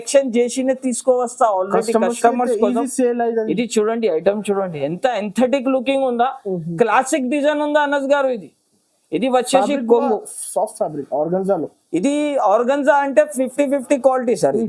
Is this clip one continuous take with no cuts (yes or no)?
yes